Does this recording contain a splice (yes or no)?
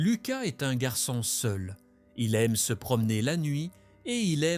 no